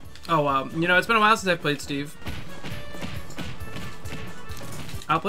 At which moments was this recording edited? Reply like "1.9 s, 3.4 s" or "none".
none